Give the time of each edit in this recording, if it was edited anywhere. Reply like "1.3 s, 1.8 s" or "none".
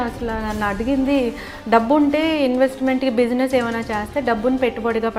none